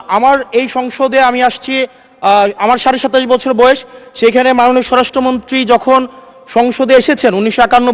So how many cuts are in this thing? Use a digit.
0